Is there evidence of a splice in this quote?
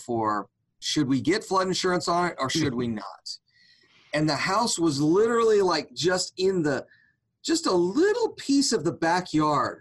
no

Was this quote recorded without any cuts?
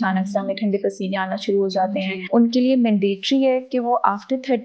no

